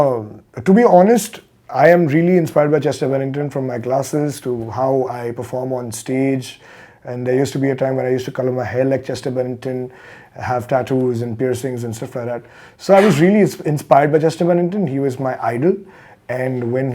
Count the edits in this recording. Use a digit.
0